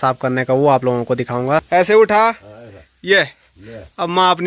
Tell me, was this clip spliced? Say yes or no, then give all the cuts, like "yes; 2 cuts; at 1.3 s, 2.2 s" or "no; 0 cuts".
yes; 1 cut; at 1.7 s